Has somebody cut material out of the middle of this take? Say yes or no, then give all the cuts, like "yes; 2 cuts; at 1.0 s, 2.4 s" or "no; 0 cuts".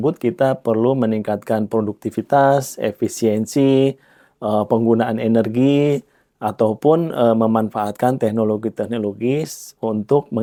no; 0 cuts